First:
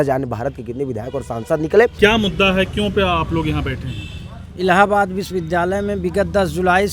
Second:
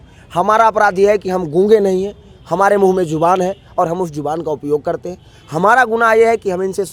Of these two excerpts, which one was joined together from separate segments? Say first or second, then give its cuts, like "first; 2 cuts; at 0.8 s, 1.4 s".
first; 1 cut; at 1.9 s